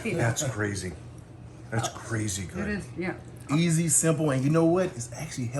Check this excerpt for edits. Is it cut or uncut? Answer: cut